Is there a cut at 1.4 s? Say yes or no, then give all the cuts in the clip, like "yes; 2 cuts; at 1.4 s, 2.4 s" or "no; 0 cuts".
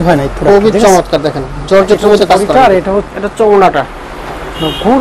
no; 1 cut; at 3.1 s